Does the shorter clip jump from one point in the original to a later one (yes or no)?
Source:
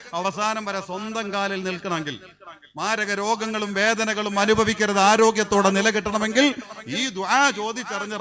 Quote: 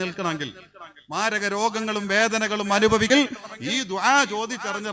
yes